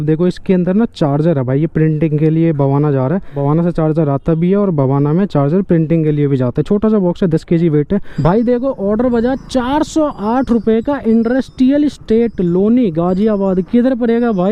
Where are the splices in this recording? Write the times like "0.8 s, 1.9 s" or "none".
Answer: 3.3 s, 8.1 s

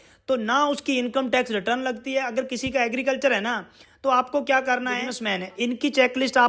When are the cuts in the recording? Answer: 5.2 s

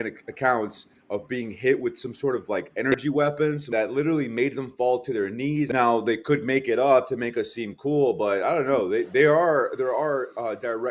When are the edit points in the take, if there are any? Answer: 3.4 s, 5.7 s

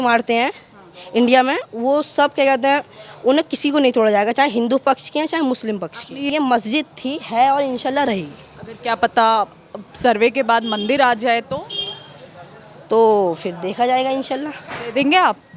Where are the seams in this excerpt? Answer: 6.3 s

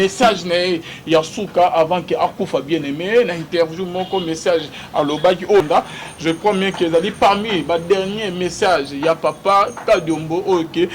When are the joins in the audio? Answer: 5.6 s

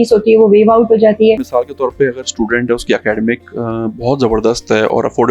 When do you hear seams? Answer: 1.5 s

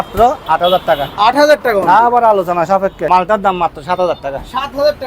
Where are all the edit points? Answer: 3.1 s

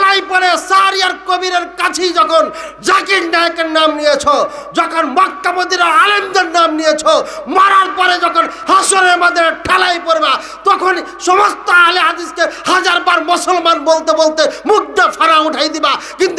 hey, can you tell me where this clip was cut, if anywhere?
none

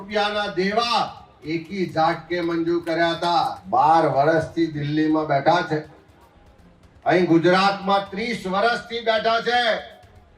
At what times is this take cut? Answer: 3.6 s

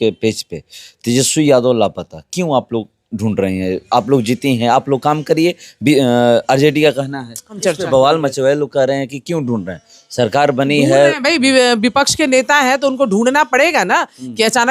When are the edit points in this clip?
7.6 s

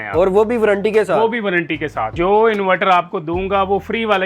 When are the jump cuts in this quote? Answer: 2.1 s

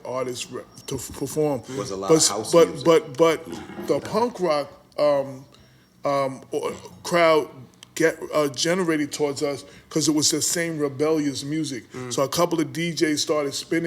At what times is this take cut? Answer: 4.0 s

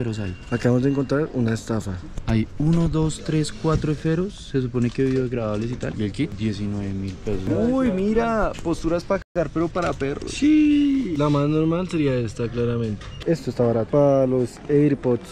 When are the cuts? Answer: 7.5 s, 13.1 s

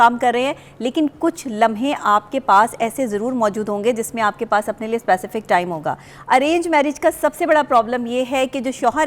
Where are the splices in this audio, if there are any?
6.1 s

